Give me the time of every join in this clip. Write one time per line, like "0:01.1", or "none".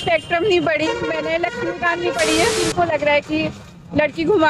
0:02.6